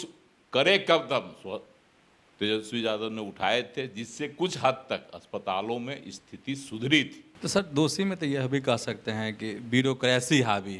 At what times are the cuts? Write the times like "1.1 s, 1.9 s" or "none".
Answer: 7.2 s